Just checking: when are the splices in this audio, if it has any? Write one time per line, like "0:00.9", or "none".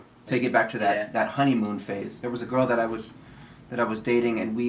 0:02.2